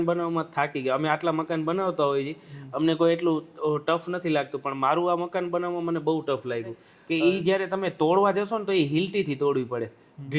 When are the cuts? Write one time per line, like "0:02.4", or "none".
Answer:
0:06.9